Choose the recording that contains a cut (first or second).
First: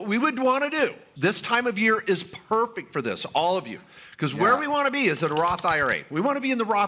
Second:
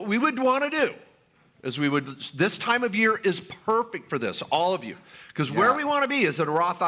first